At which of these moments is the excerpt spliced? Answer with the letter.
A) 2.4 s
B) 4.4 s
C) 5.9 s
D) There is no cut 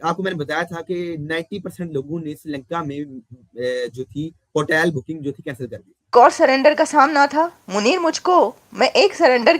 C